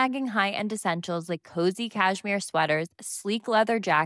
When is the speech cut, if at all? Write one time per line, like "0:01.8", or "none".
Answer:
none